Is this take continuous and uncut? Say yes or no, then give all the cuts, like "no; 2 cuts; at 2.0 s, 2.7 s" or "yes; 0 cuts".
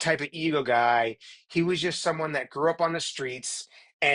yes; 0 cuts